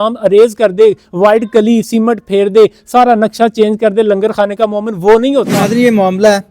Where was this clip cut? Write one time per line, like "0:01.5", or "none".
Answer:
0:05.5